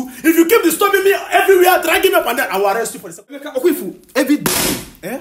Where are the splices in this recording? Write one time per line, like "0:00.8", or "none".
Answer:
0:03.4